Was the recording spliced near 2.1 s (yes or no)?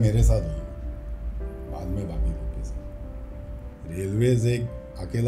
no